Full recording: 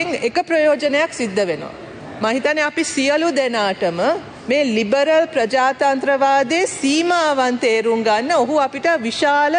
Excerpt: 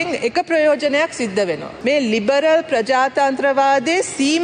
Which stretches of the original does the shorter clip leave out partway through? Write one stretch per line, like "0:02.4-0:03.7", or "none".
0:01.7-0:04.3